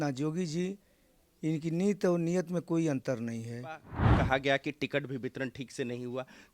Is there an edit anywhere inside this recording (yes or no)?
yes